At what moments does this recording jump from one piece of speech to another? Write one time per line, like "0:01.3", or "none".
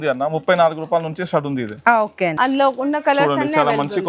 0:02.3